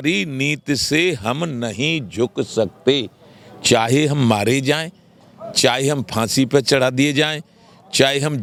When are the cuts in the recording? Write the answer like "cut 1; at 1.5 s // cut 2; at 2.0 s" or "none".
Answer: none